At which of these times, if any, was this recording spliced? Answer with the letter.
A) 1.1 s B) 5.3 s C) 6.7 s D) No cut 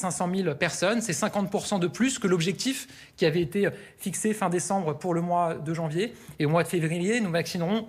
B